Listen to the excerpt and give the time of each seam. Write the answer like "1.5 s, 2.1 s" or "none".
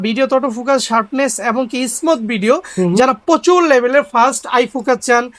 none